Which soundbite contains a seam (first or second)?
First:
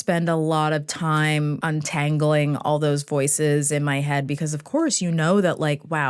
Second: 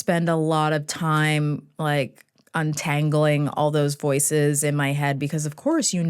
first